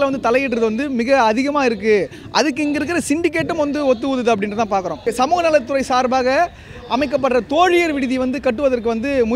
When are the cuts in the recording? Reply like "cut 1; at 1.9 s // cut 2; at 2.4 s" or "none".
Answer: cut 1; at 5.1 s